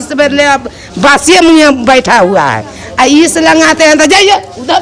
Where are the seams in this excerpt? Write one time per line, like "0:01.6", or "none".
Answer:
none

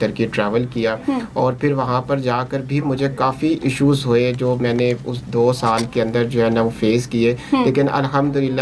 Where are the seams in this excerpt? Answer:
none

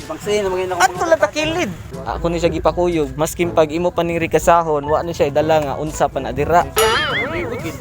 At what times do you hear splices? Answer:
0:01.8

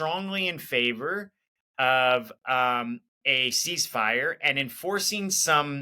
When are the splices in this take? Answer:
0:03.1

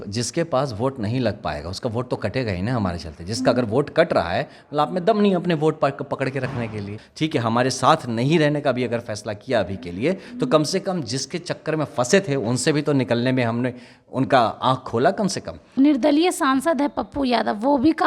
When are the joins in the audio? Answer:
0:07.0
0:15.7

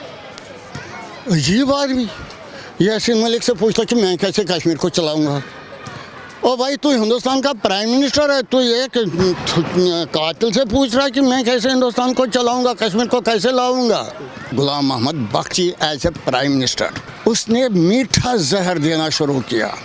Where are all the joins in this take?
0:14.5
0:17.0

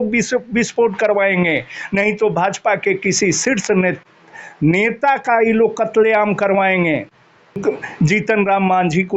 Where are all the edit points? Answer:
0:07.6

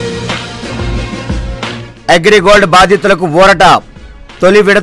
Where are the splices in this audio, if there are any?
0:01.3

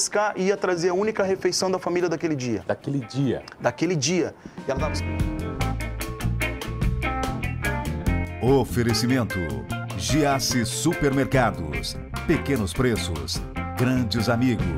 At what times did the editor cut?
0:04.8

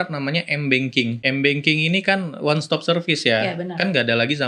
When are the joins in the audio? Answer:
0:01.2

